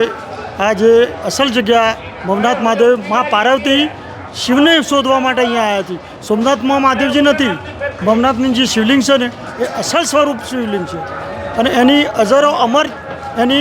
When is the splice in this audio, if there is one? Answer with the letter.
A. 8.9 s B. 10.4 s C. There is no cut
C